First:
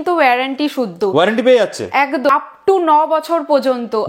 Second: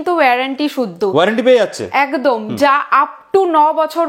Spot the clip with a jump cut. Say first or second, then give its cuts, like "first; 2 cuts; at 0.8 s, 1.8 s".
first; 1 cut; at 2.3 s